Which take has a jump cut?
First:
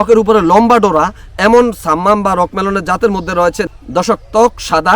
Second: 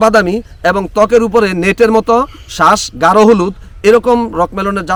first; 1 cut; at 3.6 s

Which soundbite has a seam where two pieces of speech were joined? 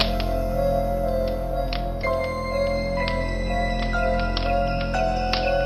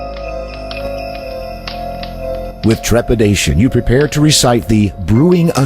second; 1 cut; at 2.6 s

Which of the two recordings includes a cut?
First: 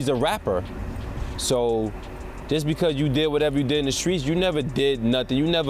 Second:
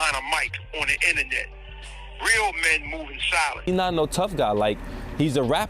second; 1 cut; at 3.6 s

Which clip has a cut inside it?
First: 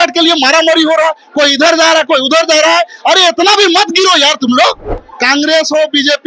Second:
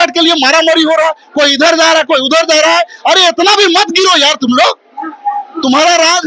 first; 1 cut; at 5.0 s

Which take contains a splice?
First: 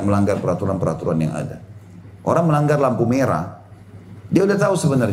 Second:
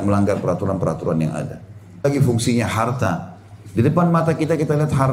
second; 1 cut; at 2.0 s

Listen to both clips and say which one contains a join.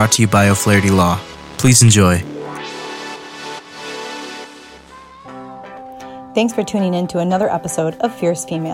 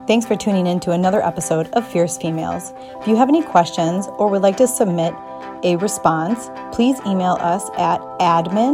first; 1 cut; at 5.2 s

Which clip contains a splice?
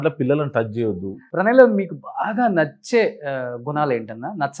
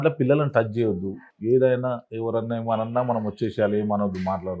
first; 1 cut; at 1.1 s

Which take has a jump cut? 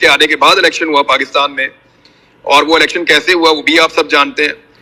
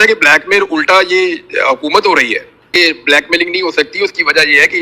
second; 1 cut; at 2.7 s

